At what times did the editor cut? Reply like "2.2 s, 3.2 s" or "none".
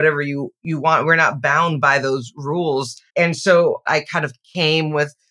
3.0 s, 3.9 s